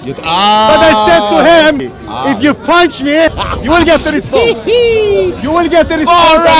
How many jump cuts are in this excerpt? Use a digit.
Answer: 2